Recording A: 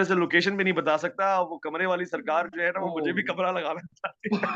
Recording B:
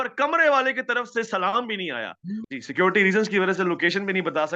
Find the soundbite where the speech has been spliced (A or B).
B